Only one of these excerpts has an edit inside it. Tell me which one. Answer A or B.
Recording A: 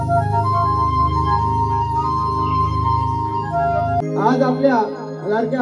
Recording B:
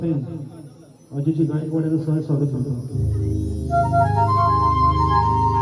A